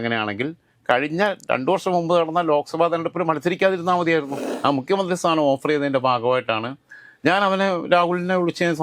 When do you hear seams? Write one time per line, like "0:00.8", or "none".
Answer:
0:04.4